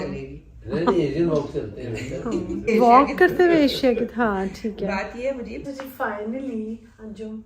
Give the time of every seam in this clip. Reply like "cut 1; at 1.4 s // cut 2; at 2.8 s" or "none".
cut 1; at 2.6 s // cut 2; at 5.6 s